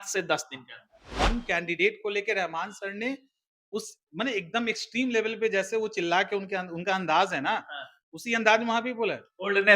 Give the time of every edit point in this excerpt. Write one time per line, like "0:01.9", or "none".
0:01.0